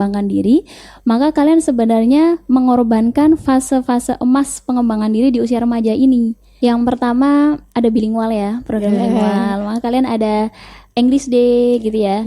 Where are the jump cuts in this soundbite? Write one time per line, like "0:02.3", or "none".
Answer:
0:06.4